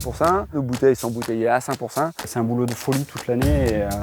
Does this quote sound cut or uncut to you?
cut